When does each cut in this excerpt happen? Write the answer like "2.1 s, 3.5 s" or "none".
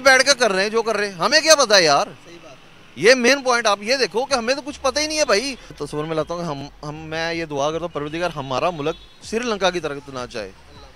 none